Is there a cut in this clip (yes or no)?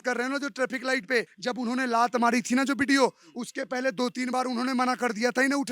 yes